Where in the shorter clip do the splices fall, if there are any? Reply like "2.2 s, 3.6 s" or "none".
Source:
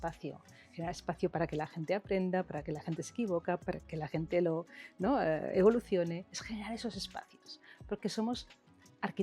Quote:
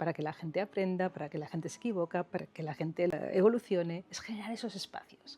3.1 s